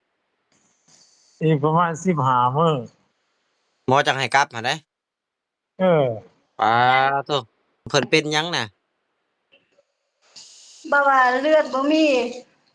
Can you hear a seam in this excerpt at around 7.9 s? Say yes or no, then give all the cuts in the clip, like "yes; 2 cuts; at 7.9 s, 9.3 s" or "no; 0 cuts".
yes; 1 cut; at 7.9 s